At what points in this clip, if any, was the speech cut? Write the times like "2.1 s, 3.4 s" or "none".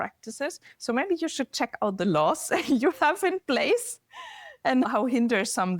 4.9 s

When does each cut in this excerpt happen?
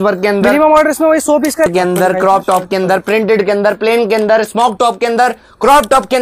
1.7 s

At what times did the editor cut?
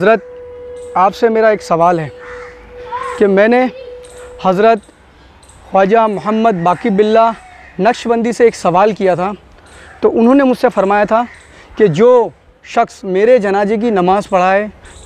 none

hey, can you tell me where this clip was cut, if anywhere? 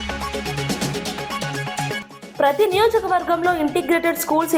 2.0 s

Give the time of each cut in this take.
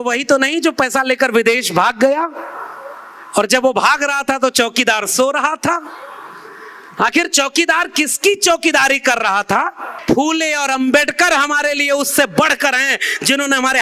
9.9 s

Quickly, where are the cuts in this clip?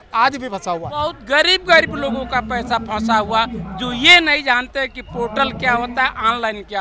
1.1 s

